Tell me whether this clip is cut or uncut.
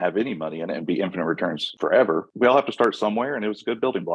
cut